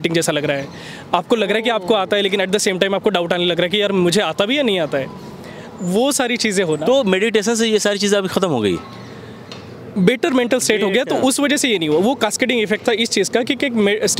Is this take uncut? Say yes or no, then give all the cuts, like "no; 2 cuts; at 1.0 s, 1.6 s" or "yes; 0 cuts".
yes; 0 cuts